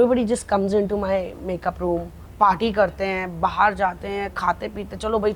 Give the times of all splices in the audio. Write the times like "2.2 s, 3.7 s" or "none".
2.2 s